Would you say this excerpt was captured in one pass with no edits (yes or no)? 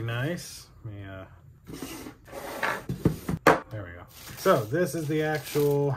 yes